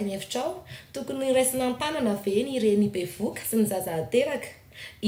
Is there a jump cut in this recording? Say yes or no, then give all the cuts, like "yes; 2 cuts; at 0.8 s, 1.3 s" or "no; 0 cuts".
no; 0 cuts